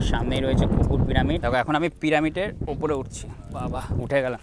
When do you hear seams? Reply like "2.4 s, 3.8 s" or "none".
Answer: 1.4 s